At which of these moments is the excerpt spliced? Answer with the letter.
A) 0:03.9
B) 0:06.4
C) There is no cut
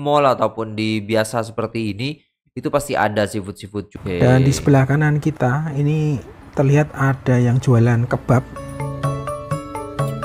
A